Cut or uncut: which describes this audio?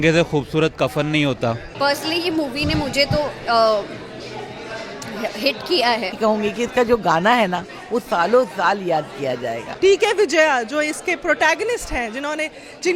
cut